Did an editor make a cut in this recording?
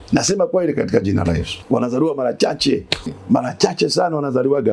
yes; 2 cuts; at 1.5 s, 3.2 s

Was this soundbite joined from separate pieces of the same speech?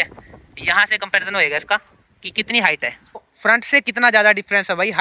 yes; 1 cut; at 3.3 s

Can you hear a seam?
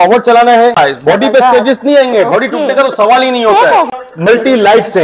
yes; 2 cuts; at 0.8 s, 4.0 s

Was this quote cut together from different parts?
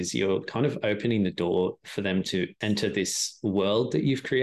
yes; 1 cut; at 2.2 s

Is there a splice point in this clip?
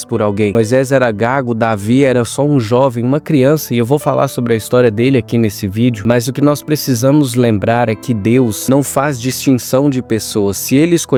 no; 0 cuts

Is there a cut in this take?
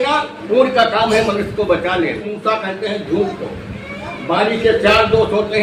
yes; 1 cut; at 2.3 s

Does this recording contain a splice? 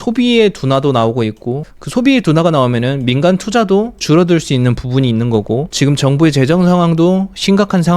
yes; 2 cuts; at 4.0 s, 5.7 s

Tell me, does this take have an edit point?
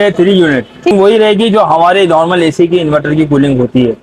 yes; 1 cut; at 0.9 s

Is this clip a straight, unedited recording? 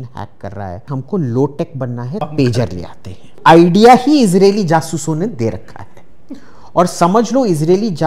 no; 3 cuts; at 0.9 s, 2.2 s, 3.4 s

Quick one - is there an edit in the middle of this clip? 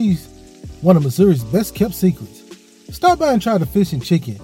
no; 0 cuts

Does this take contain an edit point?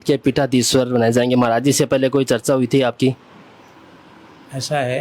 no; 0 cuts

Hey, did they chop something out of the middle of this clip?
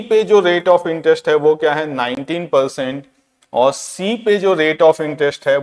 no; 0 cuts

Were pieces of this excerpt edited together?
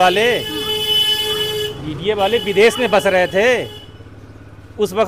no; 0 cuts

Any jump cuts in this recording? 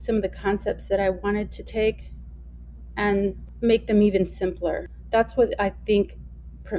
yes; 2 cuts; at 3.5 s, 4.9 s

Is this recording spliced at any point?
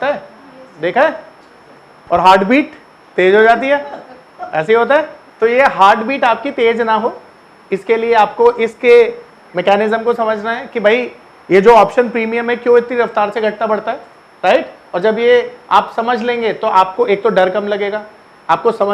yes; 1 cut; at 1.5 s

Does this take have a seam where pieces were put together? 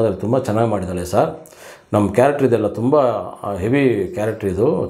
no; 0 cuts

